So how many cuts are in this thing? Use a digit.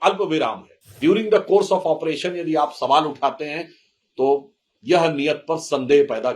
1